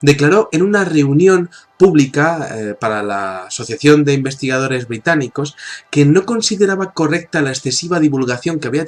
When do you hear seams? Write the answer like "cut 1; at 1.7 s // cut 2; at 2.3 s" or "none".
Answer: cut 1; at 5.1 s